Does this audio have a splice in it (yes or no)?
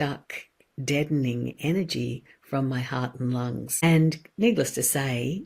yes